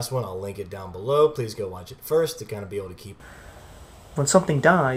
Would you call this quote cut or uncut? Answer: uncut